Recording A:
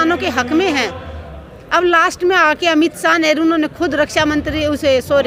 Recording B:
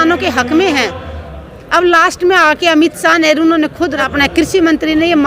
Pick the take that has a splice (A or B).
B